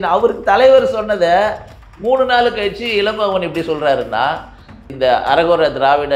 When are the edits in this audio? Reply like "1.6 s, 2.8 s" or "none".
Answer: 4.8 s